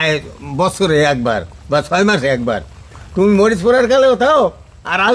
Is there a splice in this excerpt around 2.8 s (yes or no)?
yes